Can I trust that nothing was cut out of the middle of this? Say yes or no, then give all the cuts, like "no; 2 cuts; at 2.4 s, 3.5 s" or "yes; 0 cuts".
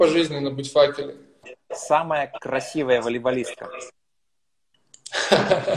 no; 1 cut; at 1.5 s